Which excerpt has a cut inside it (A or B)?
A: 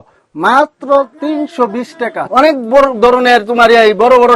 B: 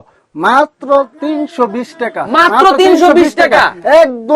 A